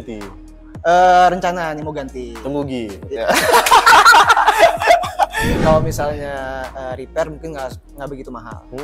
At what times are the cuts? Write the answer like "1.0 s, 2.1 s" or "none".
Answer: 5.5 s

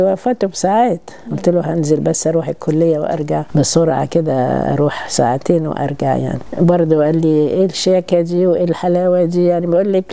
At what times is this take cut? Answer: 3.5 s, 6.4 s

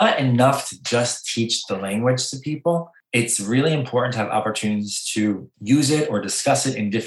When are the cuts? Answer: 3.0 s, 5.5 s

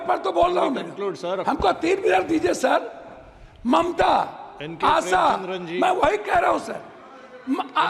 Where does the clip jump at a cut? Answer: none

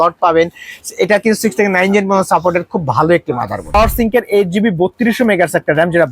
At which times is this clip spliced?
3.7 s

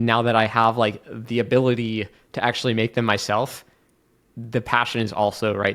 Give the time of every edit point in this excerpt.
none

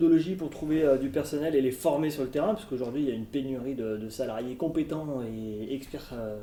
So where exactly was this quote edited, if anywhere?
none

